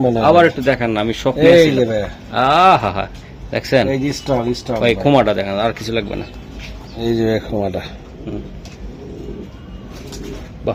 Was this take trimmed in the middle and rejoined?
no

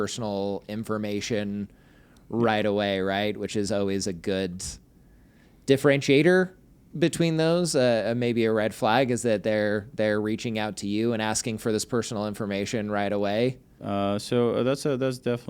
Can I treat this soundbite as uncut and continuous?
yes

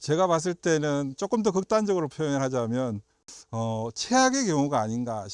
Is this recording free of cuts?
yes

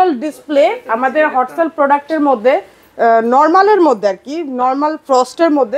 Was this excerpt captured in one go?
yes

